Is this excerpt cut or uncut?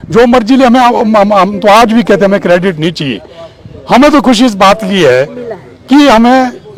uncut